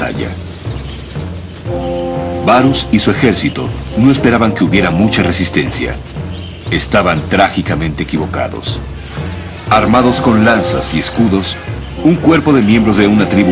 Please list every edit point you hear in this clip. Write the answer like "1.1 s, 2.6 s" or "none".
4.2 s